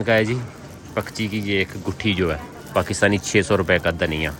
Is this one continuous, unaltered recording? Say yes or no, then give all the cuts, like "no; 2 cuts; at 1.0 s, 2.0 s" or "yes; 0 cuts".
yes; 0 cuts